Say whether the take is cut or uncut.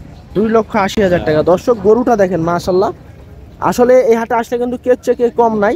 uncut